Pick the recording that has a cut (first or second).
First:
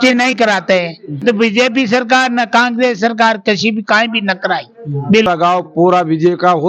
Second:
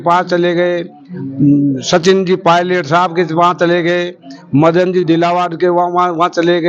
first